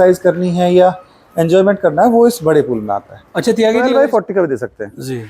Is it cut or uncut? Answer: cut